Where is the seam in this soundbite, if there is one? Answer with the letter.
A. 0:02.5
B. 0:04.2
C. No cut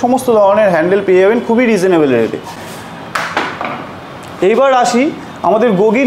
C